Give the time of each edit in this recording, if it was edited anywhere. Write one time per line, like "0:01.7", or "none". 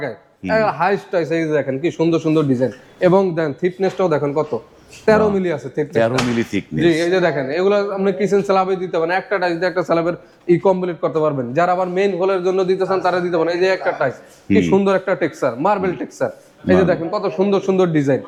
none